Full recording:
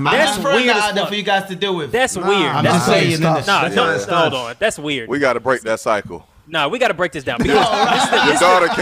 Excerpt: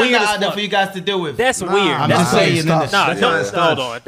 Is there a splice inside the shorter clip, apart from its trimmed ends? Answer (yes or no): no